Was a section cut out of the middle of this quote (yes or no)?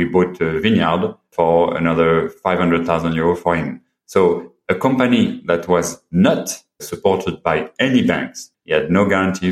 yes